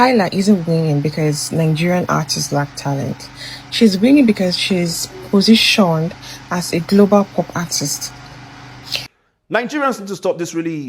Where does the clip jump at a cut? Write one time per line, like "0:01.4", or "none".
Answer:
0:09.2